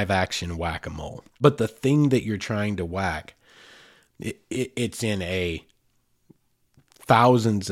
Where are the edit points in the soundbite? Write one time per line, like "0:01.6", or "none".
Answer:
0:01.2